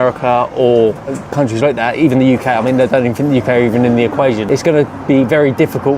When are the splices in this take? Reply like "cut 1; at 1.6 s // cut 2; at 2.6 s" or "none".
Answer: cut 1; at 4.4 s